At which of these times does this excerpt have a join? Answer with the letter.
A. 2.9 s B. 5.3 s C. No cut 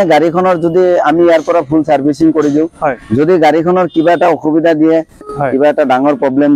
B